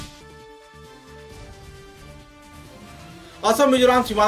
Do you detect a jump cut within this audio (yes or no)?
yes